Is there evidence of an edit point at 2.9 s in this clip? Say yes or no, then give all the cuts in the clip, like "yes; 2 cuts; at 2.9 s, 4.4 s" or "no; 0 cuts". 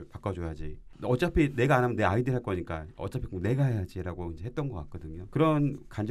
no; 2 cuts; at 0.9 s, 5.1 s